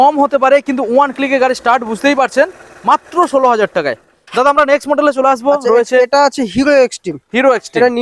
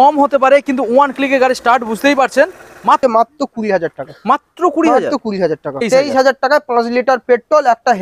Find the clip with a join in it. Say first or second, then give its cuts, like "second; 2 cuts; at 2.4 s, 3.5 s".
second; 2 cuts; at 3.0 s, 5.9 s